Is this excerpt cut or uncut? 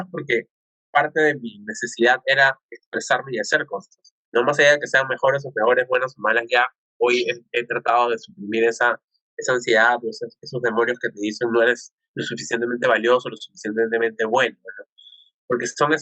uncut